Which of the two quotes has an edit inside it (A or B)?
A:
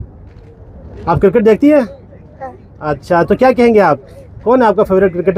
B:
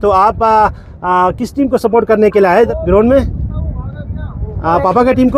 B